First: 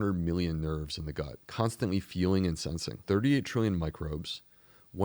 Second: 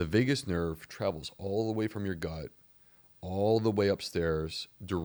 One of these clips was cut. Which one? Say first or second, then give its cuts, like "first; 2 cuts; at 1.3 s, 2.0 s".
first; 2 cuts; at 1.4 s, 3.0 s